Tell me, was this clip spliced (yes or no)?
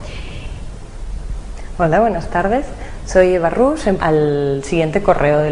no